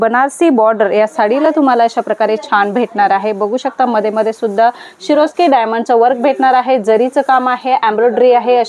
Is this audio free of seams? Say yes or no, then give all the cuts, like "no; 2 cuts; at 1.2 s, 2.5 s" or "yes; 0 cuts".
yes; 0 cuts